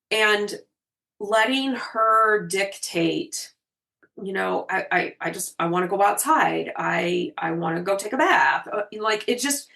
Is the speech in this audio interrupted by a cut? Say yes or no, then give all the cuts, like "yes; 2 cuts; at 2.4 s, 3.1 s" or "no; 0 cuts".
yes; 1 cut; at 4.1 s